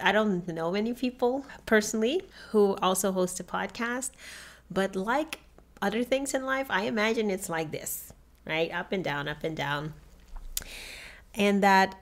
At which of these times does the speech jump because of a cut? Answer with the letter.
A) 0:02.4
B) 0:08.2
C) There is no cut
A